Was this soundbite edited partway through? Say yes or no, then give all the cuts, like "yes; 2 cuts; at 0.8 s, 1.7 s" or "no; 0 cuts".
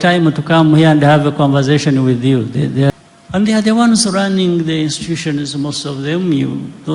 yes; 1 cut; at 2.9 s